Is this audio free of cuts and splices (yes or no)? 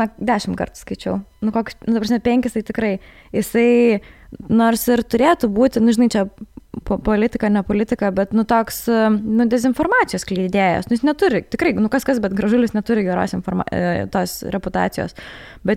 yes